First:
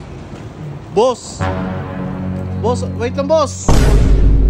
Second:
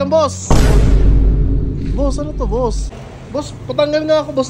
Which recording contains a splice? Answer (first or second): second